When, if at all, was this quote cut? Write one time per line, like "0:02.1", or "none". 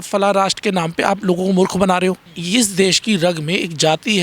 0:02.3